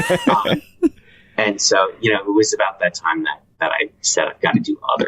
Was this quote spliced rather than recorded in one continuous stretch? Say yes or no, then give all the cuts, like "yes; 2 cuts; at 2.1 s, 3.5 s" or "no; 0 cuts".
yes; 1 cut; at 3.4 s